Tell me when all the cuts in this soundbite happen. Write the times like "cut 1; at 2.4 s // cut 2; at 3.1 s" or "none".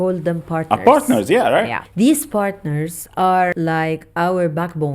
cut 1; at 1.8 s // cut 2; at 3.5 s

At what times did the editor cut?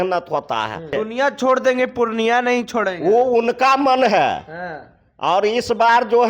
cut 1; at 0.9 s

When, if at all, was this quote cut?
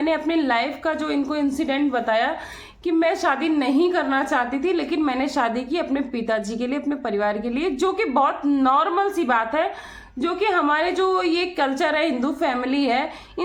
none

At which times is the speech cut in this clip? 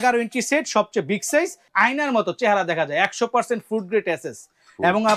cut 1; at 1.6 s

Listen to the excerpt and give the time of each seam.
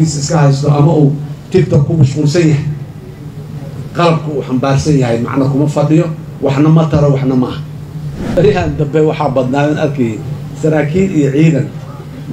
cut 1; at 8.2 s

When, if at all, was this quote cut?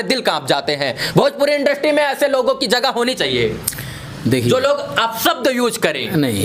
none

